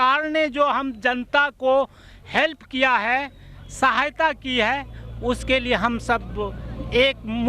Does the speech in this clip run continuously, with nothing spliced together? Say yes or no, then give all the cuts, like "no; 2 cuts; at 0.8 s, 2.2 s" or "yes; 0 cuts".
yes; 0 cuts